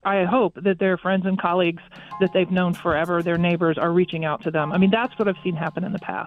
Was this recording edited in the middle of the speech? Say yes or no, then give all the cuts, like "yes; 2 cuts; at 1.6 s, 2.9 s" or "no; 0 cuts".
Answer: no; 0 cuts